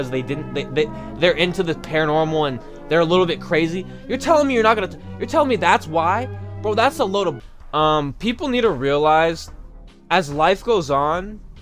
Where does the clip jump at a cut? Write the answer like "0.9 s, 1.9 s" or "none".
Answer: 7.4 s